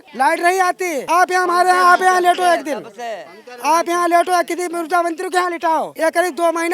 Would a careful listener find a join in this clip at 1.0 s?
yes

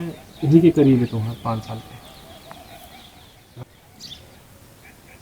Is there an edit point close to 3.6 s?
yes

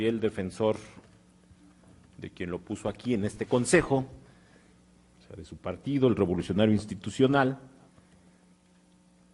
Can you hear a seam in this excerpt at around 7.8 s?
no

